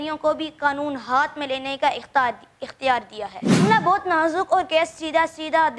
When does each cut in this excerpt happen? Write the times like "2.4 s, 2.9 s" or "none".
3.6 s